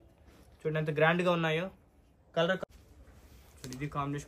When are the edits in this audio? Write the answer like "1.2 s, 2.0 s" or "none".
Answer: 2.6 s

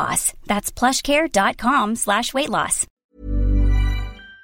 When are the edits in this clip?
2.9 s

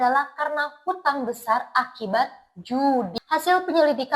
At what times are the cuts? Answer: 3.1 s

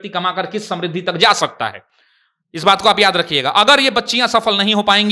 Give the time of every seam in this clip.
none

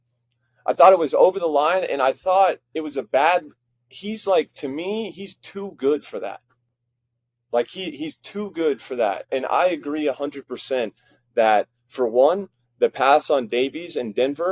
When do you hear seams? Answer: none

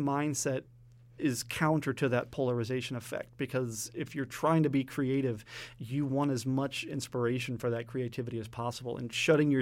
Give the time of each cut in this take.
1.1 s

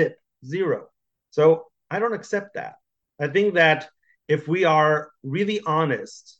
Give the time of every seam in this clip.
none

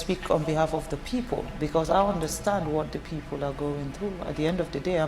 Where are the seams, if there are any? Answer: 1.5 s

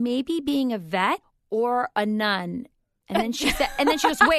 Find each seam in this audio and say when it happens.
1.3 s

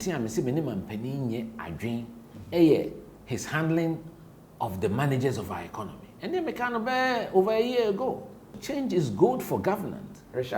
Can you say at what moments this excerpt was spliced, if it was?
8.6 s

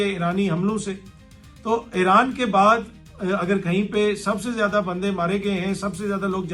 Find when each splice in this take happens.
none

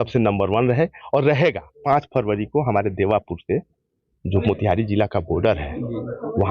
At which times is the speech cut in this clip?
1.8 s

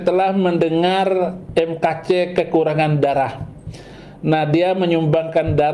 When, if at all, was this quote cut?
none

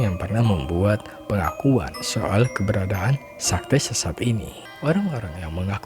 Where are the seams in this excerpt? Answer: 4.7 s

